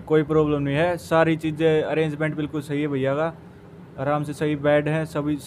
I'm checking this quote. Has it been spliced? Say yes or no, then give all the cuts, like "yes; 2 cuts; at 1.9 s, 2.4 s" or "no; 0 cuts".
no; 0 cuts